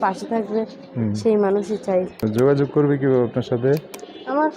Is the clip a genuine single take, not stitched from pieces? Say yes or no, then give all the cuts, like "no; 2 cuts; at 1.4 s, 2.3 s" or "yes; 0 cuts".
no; 1 cut; at 2.1 s